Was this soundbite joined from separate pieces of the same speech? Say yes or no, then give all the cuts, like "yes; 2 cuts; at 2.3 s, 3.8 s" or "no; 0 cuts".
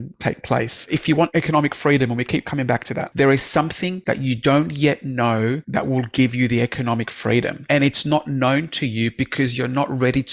yes; 5 cuts; at 1.1 s, 3.0 s, 3.9 s, 5.6 s, 7.6 s